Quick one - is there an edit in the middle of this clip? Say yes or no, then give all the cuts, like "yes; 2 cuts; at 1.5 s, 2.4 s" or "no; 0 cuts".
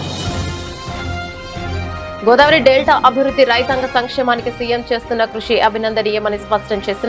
yes; 1 cut; at 0.9 s